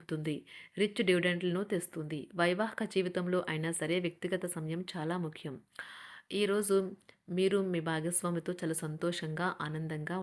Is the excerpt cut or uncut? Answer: uncut